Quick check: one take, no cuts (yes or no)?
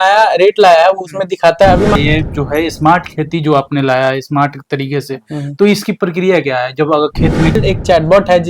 no